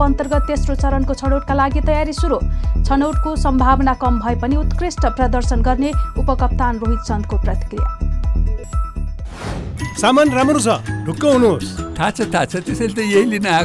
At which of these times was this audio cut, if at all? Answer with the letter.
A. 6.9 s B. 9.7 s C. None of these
B